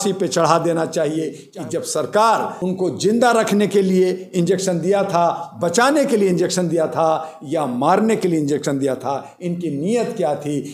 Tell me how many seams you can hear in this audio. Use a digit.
2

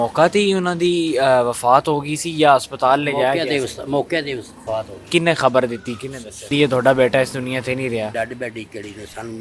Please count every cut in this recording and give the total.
3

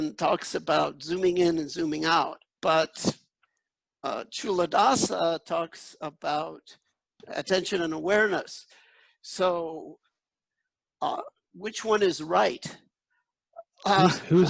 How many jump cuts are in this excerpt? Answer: 2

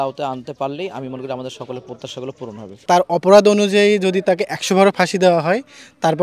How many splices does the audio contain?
1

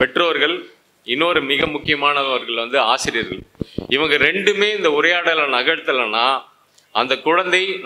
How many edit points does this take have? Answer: 0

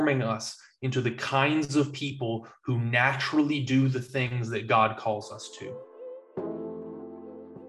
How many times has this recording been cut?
1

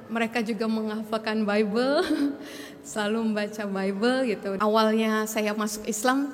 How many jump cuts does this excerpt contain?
1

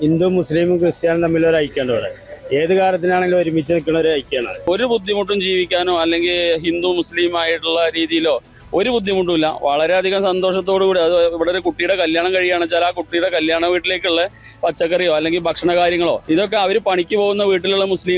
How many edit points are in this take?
1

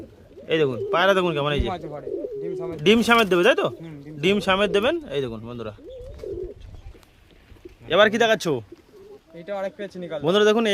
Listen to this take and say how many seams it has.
0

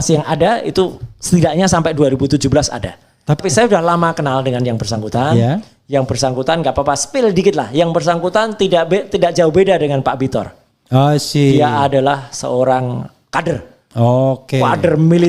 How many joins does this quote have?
1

